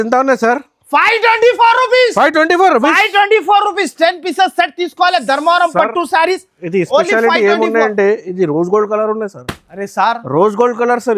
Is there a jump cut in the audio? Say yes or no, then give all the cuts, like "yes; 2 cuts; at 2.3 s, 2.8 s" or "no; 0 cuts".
no; 0 cuts